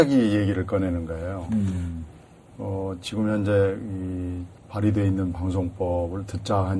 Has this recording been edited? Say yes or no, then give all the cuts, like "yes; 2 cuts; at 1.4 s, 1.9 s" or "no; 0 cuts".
no; 0 cuts